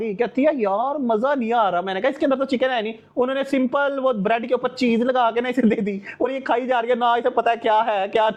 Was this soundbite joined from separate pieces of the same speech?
no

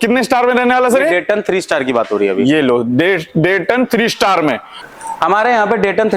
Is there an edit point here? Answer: yes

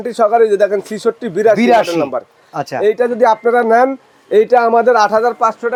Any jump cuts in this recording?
no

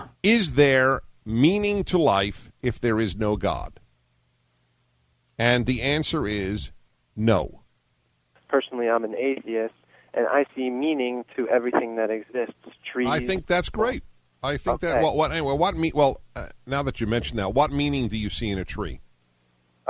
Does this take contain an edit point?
yes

